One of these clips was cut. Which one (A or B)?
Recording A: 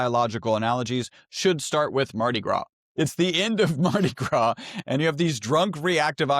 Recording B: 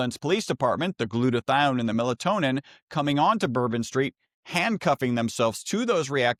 A